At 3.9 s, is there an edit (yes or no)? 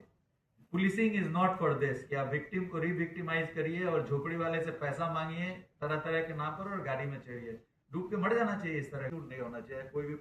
no